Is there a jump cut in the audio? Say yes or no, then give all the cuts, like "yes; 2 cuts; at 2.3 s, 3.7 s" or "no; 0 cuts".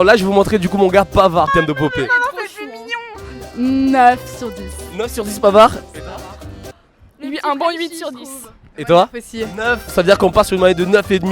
yes; 1 cut; at 1.5 s